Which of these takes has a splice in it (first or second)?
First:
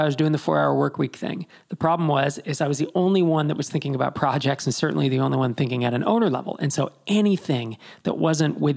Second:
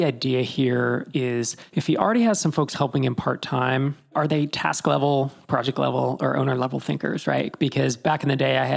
second